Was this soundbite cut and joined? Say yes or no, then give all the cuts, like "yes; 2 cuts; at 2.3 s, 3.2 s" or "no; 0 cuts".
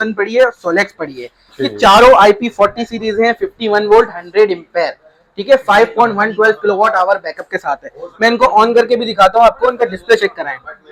no; 0 cuts